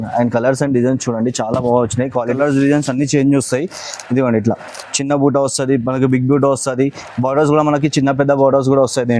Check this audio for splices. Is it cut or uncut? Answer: cut